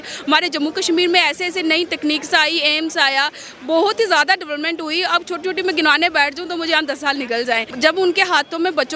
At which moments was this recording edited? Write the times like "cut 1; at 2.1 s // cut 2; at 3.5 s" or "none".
cut 1; at 7.7 s

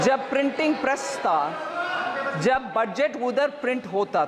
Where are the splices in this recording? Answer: none

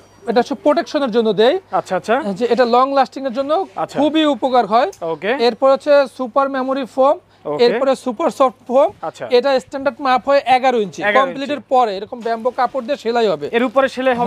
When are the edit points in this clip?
none

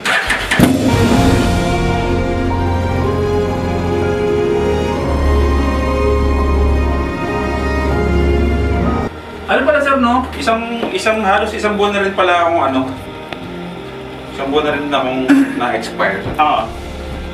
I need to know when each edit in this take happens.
cut 1; at 9.1 s // cut 2; at 10.3 s

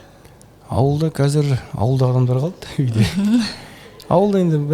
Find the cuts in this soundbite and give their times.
none

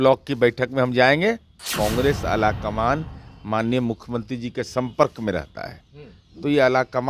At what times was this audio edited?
cut 1; at 1.7 s

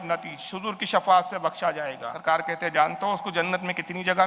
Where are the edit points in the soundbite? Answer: cut 1; at 2.1 s

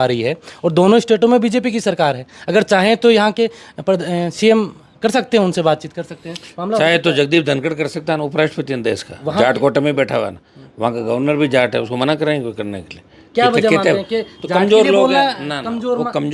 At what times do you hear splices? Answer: none

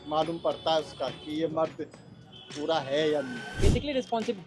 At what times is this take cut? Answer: cut 1; at 3.5 s

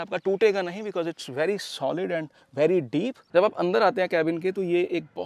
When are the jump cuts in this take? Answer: cut 1; at 3.2 s

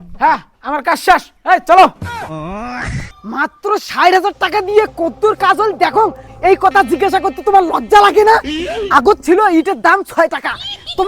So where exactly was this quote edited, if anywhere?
cut 1; at 3.1 s

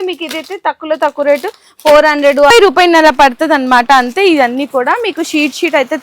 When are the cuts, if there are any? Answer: cut 1; at 2.5 s

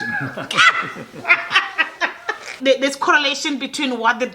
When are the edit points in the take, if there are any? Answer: cut 1; at 2.5 s

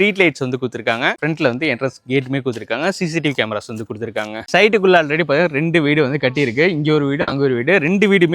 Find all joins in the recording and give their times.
cut 1; at 1.2 s // cut 2; at 4.5 s

